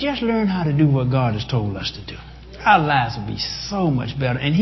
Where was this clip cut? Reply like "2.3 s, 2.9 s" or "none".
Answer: none